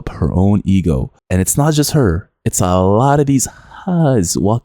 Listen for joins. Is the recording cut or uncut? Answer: uncut